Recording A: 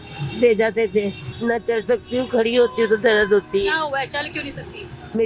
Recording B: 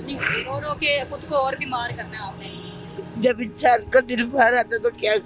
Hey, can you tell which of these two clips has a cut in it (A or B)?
A